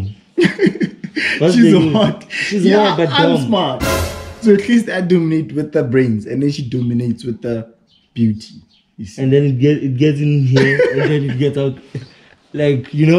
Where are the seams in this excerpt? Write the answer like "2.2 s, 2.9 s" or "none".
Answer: none